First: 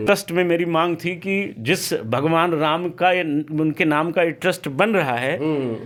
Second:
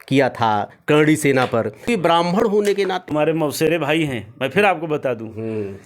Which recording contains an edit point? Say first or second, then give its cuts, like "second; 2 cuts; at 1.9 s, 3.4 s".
second; 2 cuts; at 1.8 s, 3.1 s